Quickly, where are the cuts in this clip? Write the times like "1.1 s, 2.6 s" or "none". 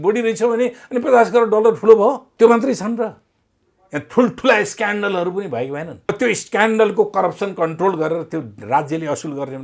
2.3 s, 6.1 s